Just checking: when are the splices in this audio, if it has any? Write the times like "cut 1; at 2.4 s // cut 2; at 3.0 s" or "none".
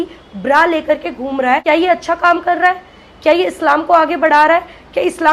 cut 1; at 1.6 s